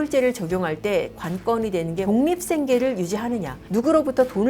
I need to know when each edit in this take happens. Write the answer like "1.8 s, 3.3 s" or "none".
2.0 s, 3.6 s